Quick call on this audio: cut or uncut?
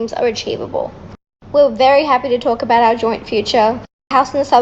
cut